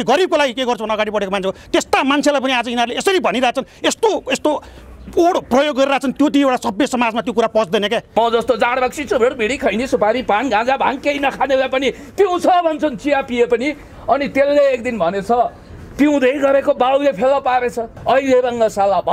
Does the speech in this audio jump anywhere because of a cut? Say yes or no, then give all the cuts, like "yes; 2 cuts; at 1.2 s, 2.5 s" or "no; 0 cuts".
yes; 2 cuts; at 8.1 s, 17.9 s